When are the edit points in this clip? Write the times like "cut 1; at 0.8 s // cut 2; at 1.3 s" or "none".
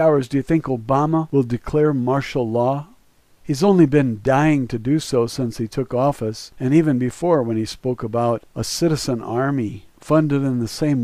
cut 1; at 9.9 s